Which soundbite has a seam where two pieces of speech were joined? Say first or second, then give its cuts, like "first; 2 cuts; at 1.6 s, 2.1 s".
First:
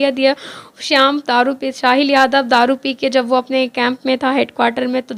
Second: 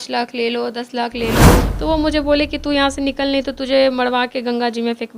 second; 1 cut; at 1.7 s